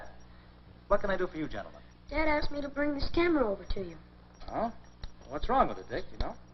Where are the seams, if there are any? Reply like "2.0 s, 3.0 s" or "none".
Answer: none

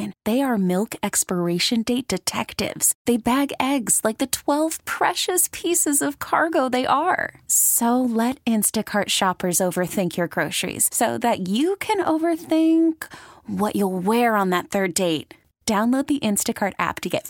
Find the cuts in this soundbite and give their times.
none

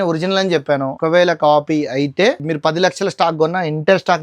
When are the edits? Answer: 0.9 s, 2.5 s

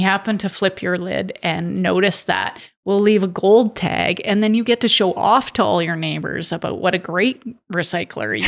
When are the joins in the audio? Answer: none

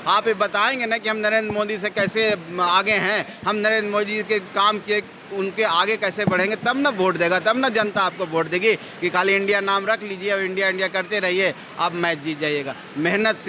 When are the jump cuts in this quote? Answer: none

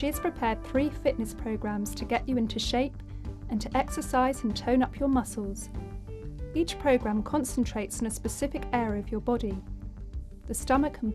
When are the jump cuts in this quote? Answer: 5.3 s

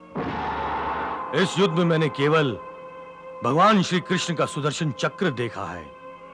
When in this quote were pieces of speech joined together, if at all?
1.2 s

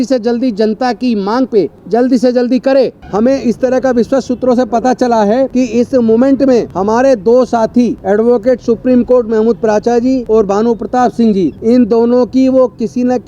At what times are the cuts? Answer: 1.8 s, 3.0 s, 5.5 s, 6.7 s, 8.0 s, 10.2 s, 11.6 s

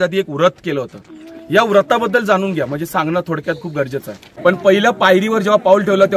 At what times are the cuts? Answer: 4.3 s

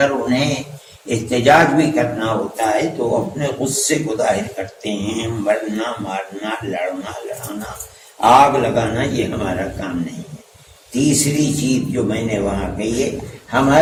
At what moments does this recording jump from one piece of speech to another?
none

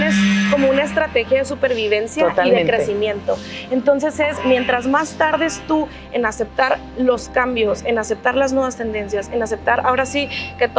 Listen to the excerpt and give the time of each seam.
none

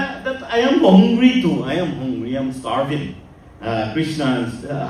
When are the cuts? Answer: none

